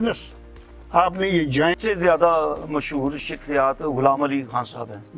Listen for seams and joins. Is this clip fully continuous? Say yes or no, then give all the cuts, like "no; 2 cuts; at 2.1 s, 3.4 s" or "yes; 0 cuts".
no; 1 cut; at 1.8 s